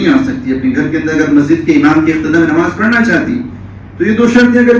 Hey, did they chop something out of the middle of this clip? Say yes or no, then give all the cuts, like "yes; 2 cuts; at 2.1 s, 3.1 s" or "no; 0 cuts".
no; 0 cuts